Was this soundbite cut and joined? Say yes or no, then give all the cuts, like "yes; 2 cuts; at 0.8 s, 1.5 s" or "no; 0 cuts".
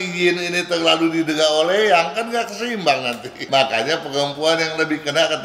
yes; 1 cut; at 3.4 s